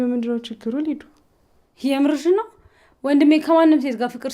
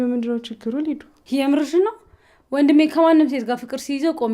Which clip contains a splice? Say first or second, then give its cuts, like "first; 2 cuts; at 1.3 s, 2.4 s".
second; 1 cut; at 1.1 s